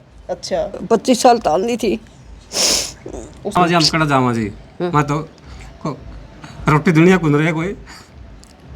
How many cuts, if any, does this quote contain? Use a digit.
1